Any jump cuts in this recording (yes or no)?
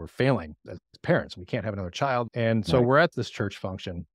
yes